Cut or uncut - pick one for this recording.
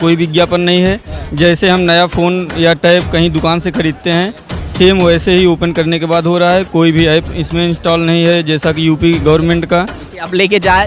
uncut